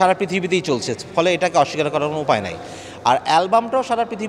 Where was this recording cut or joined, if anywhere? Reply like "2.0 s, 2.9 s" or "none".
none